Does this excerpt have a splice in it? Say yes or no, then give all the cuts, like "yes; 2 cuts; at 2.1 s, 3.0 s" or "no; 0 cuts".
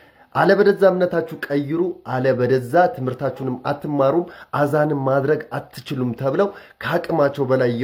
no; 0 cuts